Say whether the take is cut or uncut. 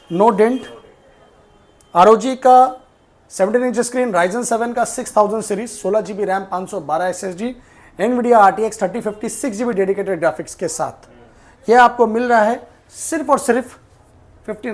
uncut